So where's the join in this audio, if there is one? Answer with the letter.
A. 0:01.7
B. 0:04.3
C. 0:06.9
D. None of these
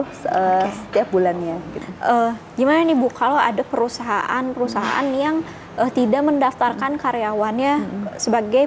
A